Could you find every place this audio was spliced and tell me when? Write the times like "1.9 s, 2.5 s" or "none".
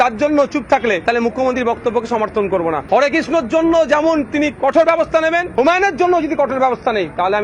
1.0 s, 2.8 s, 5.5 s